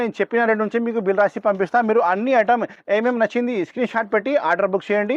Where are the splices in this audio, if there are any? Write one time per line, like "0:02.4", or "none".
none